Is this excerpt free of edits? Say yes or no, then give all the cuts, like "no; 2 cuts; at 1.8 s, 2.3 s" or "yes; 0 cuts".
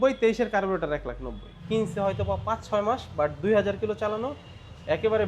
no; 1 cut; at 1.5 s